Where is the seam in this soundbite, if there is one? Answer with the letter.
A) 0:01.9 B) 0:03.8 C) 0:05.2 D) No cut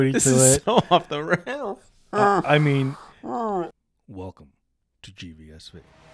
B